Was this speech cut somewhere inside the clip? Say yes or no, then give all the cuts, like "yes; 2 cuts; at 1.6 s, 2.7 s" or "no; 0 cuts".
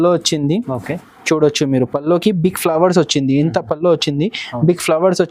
no; 0 cuts